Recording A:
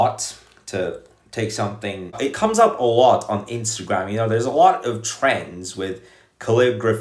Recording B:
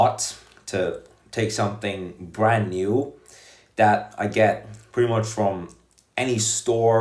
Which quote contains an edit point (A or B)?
A